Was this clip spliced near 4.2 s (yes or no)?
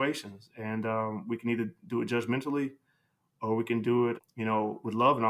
yes